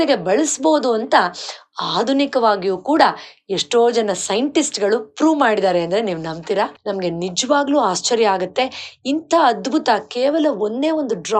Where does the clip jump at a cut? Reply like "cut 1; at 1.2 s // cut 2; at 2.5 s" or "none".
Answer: cut 1; at 6.8 s